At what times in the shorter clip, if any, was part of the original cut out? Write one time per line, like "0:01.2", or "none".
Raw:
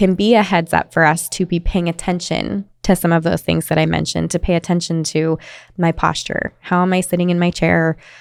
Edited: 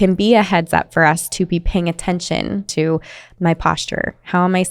0:02.7